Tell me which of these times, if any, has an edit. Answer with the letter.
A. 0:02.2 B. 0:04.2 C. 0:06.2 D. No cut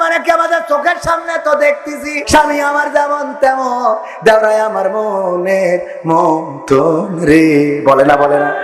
A